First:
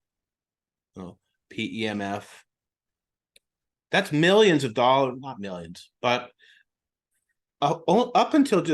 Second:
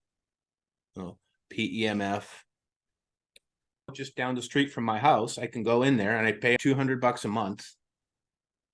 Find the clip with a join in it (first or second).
second